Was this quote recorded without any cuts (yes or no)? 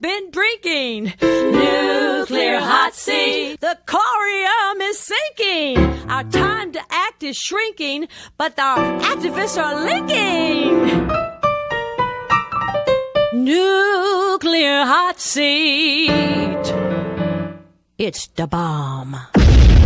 yes